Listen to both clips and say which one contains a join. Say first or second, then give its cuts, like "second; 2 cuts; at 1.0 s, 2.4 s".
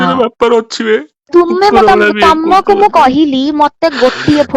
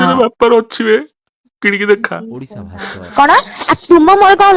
first; 1 cut; at 1.2 s